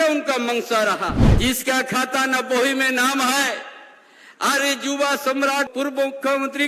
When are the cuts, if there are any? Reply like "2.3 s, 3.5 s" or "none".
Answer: 1.2 s, 5.7 s